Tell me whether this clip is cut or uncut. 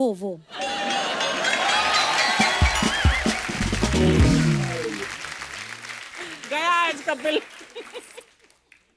uncut